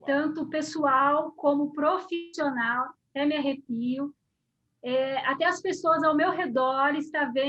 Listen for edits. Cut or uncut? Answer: uncut